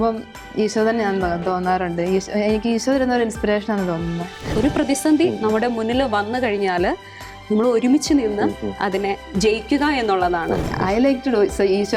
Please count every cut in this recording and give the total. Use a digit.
2